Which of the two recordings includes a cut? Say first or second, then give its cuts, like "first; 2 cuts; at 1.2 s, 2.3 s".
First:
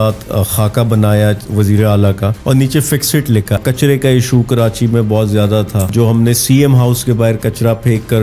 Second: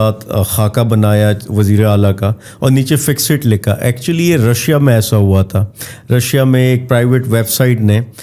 first; 3 cuts; at 2.3 s, 3.6 s, 5.8 s